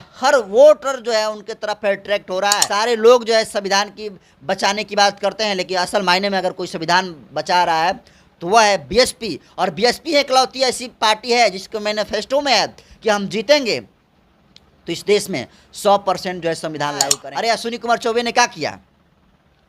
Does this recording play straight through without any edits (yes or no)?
no